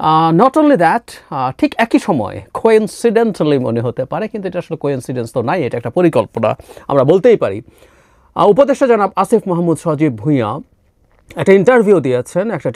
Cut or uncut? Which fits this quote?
uncut